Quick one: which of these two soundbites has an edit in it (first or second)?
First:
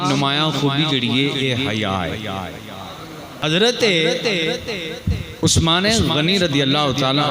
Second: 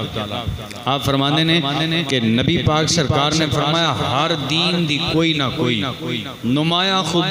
first